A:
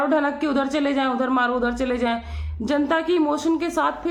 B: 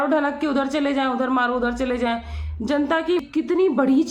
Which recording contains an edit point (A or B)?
B